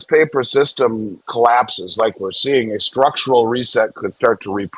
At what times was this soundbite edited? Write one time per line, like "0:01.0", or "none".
0:01.2